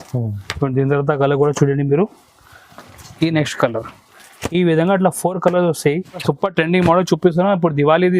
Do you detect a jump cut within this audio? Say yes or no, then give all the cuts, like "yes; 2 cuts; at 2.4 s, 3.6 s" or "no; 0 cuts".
yes; 1 cut; at 6.2 s